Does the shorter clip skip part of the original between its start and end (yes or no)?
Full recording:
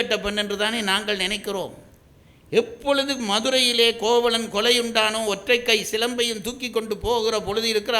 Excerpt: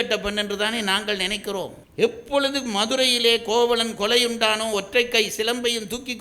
yes